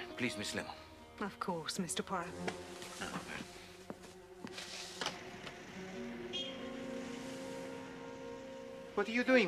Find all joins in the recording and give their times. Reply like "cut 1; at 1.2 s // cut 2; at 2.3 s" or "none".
cut 1; at 6.3 s